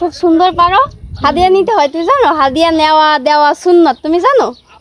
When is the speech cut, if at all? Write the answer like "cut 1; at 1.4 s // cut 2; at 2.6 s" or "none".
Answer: cut 1; at 1.0 s